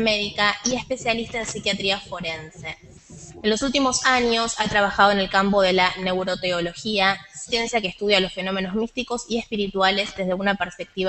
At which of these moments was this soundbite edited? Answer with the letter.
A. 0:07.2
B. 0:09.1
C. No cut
C